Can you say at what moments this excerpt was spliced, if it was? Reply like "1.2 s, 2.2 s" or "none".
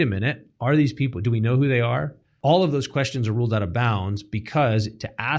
2.2 s